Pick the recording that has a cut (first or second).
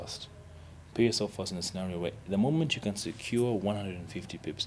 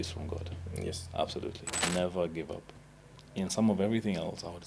second